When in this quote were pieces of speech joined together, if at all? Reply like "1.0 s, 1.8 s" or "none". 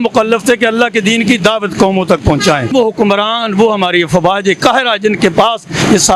2.7 s